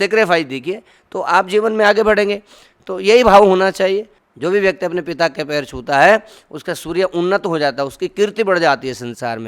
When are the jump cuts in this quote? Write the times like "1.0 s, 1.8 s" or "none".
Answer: 4.2 s

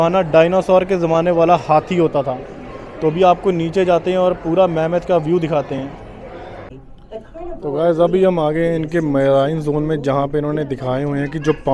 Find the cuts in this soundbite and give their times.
none

